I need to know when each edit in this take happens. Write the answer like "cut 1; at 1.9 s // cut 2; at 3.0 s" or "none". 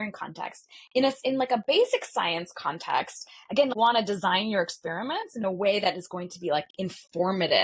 cut 1; at 3.7 s